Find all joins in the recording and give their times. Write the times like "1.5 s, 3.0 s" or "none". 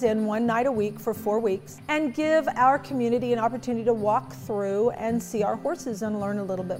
1.7 s